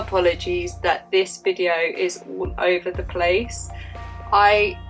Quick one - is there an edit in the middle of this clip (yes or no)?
no